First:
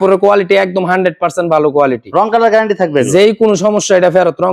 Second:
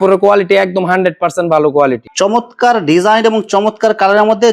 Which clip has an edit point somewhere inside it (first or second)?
second